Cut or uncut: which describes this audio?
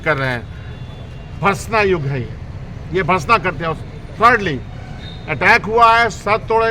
uncut